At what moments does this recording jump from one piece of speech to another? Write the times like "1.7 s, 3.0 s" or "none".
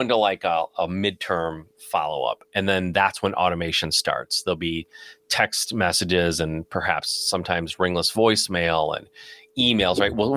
none